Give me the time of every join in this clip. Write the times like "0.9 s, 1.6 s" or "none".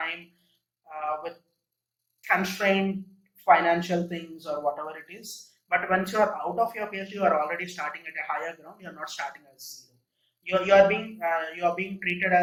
none